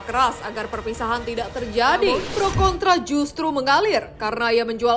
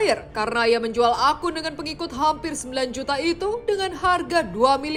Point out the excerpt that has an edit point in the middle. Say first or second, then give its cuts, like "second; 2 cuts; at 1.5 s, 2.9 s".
first; 1 cut; at 2.3 s